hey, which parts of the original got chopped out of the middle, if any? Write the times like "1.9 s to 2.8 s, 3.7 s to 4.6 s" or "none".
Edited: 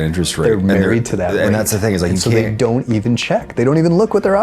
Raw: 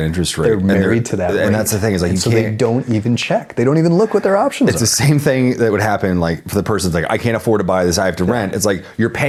none

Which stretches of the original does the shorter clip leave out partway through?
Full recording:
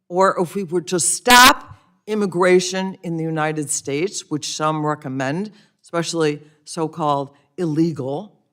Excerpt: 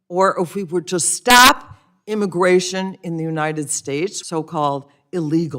4.2 s to 6.6 s

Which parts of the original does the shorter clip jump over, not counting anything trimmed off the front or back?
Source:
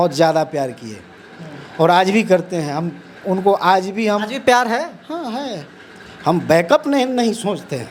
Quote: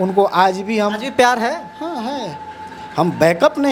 none

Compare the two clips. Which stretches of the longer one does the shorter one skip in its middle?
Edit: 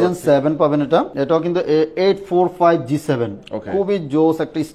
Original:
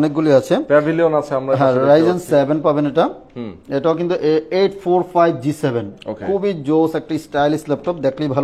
3.2 s to 3.7 s

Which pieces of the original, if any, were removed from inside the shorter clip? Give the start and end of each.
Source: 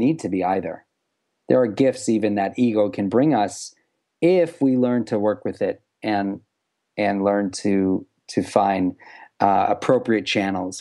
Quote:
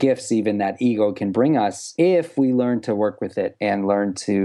3.6 s to 4.1 s, 5.8 s to 6.9 s

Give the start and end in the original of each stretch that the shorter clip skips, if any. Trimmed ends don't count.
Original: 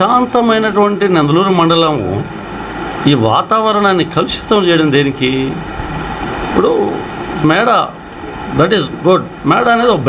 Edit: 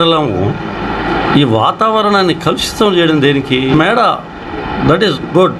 5.4 s to 7.4 s

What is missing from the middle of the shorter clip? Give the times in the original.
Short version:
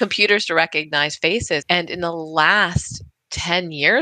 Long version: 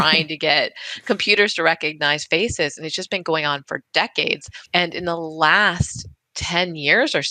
2.7 s to 4.7 s

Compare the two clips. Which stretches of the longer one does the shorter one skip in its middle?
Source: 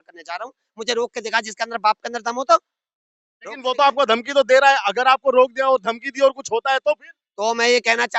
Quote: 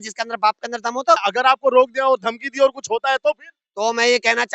2.7 s to 4.9 s

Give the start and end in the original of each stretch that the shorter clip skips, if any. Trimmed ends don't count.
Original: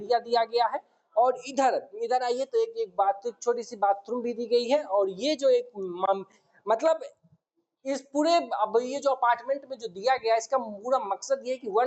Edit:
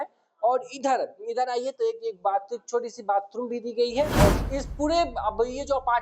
5.1 s to 7.7 s

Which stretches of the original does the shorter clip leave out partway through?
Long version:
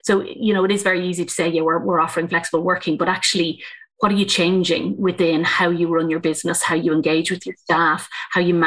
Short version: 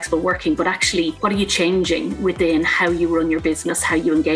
3.6 s to 4.0 s

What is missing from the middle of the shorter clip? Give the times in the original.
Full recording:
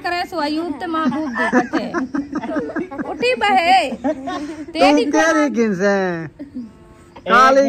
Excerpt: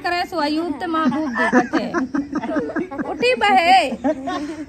none

